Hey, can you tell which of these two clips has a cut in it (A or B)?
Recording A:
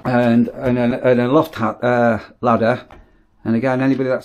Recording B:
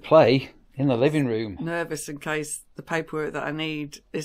B